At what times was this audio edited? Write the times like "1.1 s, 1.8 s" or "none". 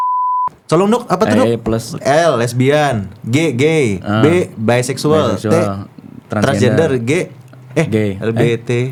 none